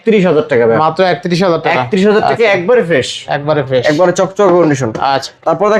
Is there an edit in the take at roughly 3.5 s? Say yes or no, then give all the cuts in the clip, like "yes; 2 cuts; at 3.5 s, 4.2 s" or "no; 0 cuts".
no; 0 cuts